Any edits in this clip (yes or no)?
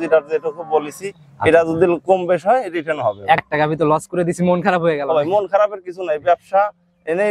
yes